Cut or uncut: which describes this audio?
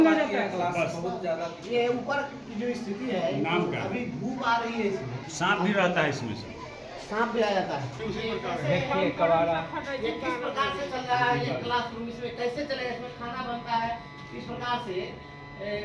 cut